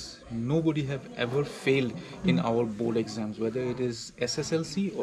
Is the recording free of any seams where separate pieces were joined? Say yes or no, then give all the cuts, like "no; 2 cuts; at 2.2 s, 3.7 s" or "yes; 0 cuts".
yes; 0 cuts